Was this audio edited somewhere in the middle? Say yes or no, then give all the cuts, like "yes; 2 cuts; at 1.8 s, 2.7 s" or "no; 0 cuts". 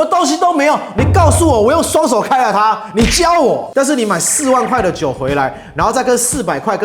yes; 1 cut; at 3.7 s